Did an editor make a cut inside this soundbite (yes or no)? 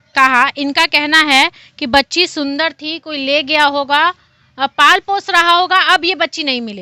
no